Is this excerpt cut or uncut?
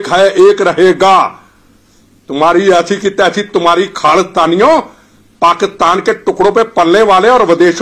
uncut